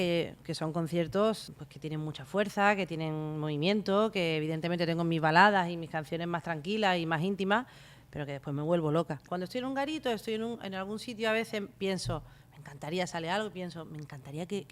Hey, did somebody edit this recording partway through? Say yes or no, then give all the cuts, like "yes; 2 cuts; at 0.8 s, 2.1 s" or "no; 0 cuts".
yes; 2 cuts; at 1.5 s, 9.2 s